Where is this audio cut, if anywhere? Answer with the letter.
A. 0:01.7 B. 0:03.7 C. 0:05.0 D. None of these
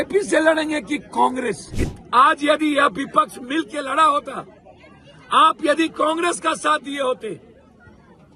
A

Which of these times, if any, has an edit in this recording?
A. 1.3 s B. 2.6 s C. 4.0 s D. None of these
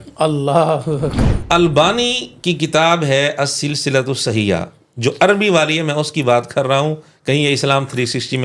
A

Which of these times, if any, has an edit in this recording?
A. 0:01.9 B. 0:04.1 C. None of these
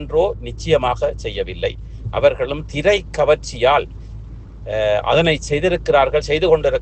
C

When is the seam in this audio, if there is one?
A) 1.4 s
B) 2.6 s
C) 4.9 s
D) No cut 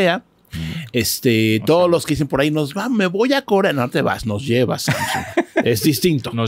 D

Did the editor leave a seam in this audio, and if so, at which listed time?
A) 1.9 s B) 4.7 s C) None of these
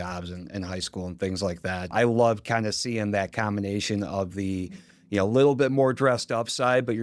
A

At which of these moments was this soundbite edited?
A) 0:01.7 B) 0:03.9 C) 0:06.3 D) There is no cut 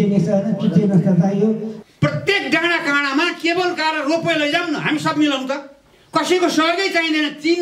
A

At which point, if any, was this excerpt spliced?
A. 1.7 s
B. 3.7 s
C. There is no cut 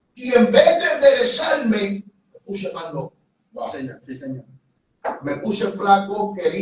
C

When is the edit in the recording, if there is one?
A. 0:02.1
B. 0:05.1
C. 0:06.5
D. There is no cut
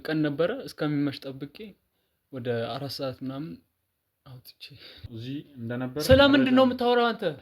B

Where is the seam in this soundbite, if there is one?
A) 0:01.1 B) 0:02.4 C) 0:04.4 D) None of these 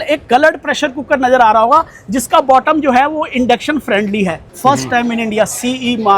C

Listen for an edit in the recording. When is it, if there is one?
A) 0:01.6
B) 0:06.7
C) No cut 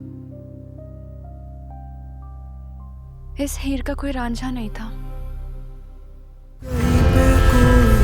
B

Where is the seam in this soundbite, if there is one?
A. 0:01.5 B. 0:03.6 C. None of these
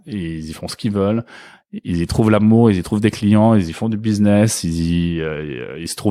A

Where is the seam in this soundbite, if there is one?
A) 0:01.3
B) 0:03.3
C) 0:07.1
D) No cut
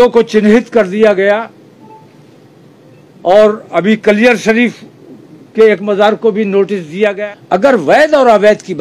C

